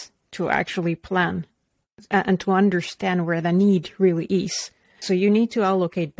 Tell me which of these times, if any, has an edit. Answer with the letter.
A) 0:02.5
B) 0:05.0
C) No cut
B